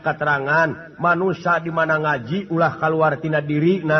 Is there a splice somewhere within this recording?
no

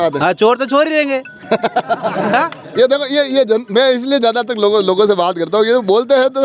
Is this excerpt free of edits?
yes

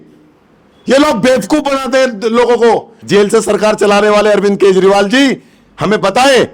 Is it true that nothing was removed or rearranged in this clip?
no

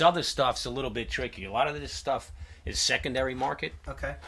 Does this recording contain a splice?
no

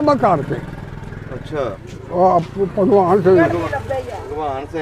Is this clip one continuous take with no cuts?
no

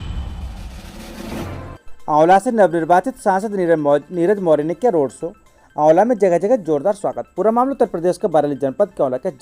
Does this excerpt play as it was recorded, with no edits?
no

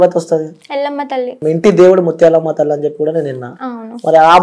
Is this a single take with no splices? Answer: no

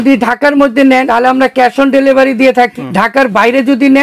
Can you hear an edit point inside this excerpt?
yes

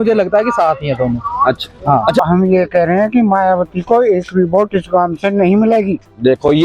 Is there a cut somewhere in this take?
yes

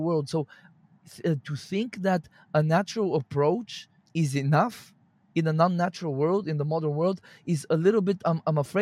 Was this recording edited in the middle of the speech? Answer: no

